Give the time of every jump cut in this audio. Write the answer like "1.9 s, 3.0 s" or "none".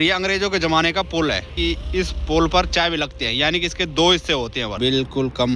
1.5 s, 4.8 s